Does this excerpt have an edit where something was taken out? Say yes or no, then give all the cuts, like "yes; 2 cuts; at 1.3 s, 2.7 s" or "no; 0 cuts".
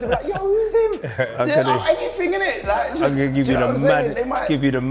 yes; 1 cut; at 1.4 s